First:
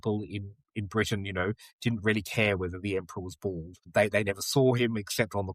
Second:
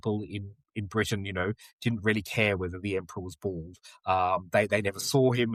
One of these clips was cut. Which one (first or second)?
first